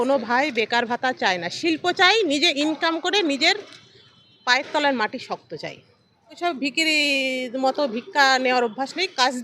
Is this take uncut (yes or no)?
no